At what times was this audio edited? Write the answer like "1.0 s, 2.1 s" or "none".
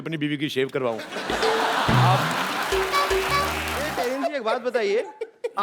3.9 s